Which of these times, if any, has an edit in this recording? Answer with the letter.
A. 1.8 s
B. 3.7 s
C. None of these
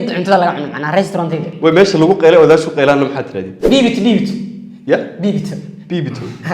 B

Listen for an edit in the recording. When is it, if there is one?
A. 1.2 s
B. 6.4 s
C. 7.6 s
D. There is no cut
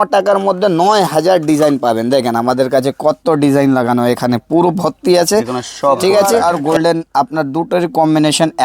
B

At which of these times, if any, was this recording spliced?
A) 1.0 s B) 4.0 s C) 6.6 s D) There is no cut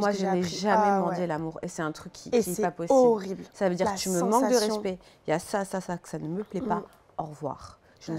D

